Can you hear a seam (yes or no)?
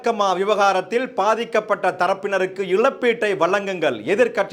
no